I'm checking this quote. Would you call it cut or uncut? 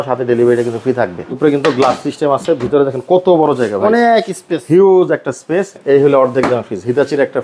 cut